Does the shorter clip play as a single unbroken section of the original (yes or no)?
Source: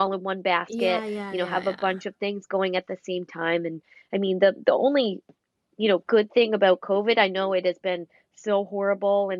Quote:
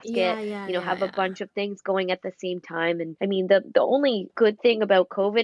no